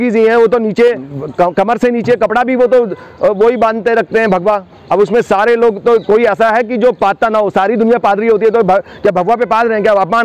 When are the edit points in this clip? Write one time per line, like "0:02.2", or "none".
0:01.1

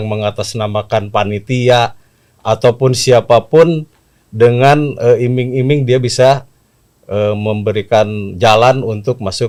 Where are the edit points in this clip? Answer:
none

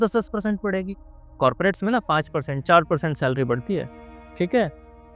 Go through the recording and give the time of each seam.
none

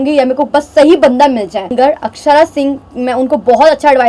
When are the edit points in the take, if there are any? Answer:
0:01.7

